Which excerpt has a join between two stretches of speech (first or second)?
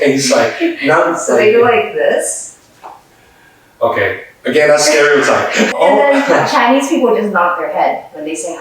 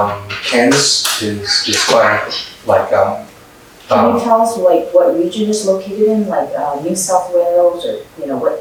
first